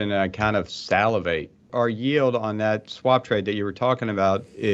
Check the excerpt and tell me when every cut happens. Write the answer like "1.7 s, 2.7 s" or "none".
1.7 s